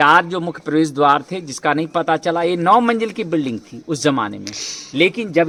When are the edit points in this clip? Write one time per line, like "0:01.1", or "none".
none